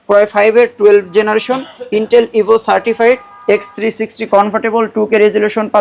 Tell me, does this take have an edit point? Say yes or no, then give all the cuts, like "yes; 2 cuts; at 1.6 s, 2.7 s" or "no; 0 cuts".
no; 0 cuts